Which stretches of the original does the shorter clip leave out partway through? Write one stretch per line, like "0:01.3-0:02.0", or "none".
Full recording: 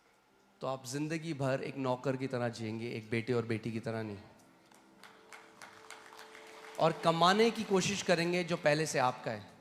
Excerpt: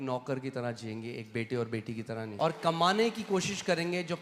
0:04.1-0:06.7

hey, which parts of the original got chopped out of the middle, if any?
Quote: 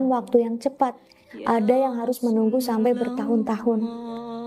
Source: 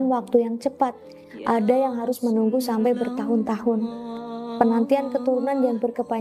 none

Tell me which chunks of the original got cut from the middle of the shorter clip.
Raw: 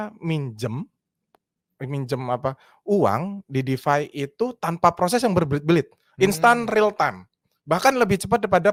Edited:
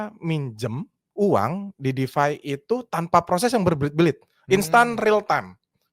0:01.0-0:02.7

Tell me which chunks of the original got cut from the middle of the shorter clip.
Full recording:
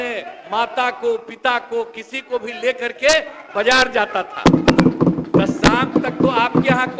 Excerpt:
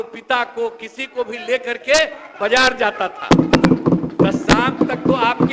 none

